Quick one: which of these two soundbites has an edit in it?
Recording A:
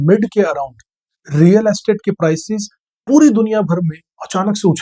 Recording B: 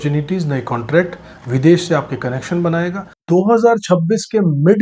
B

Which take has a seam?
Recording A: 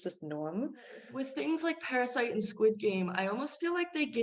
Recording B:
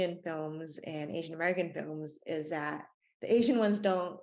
A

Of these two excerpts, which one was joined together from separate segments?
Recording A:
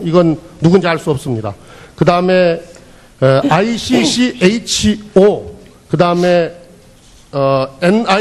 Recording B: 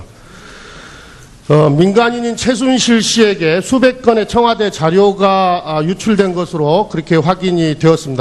B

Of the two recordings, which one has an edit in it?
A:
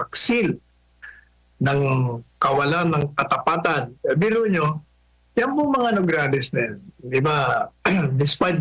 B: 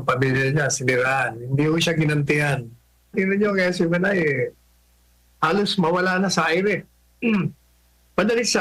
B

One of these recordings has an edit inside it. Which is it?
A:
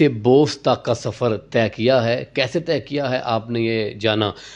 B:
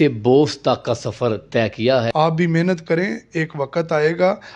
B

